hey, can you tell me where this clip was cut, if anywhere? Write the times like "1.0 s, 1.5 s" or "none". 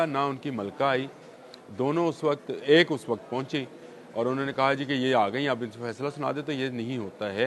none